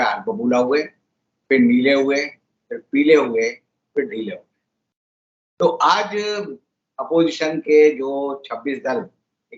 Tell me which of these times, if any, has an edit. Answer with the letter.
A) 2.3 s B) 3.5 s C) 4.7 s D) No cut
D